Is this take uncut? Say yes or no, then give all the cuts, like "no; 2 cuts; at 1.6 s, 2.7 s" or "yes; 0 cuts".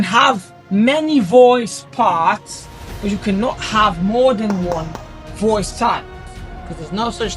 no; 1 cut; at 6.3 s